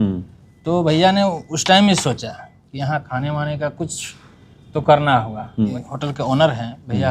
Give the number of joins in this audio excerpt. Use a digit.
1